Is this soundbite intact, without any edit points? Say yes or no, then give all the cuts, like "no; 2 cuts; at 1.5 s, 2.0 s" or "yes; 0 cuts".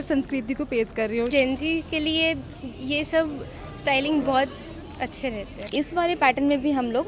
no; 2 cuts; at 1.3 s, 5.6 s